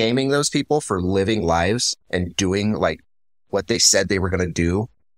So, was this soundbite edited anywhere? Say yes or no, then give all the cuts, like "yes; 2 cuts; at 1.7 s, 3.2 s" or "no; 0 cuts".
no; 0 cuts